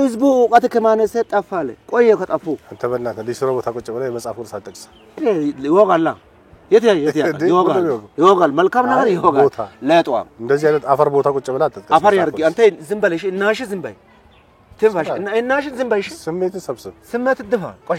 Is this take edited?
no; 0 cuts

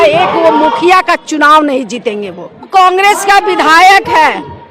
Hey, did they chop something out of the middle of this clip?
yes; 1 cut; at 2.7 s

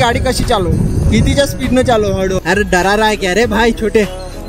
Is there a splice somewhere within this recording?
yes; 1 cut; at 2.4 s

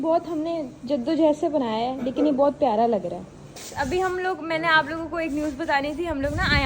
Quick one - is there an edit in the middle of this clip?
yes; 1 cut; at 3.5 s

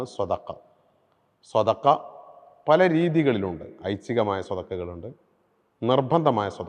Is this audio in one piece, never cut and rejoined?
yes; 0 cuts

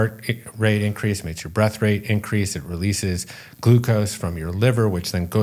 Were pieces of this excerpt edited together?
no; 0 cuts

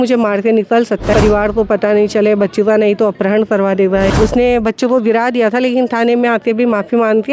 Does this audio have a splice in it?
yes; 2 cuts; at 1.1 s, 4.1 s

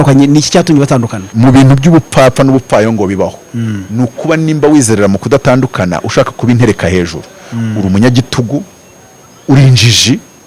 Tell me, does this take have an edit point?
yes; 1 cut; at 1.2 s

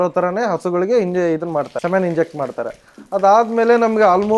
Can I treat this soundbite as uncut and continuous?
no; 1 cut; at 1.7 s

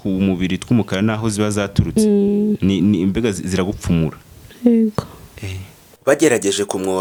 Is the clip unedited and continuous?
yes; 0 cuts

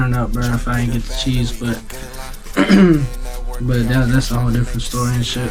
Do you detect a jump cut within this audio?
no; 0 cuts

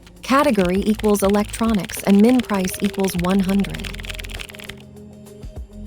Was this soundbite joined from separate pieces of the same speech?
yes; 1 cut; at 4.1 s

